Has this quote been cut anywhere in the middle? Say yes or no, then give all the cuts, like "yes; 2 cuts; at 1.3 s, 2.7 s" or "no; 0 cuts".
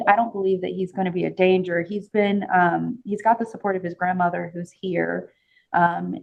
no; 0 cuts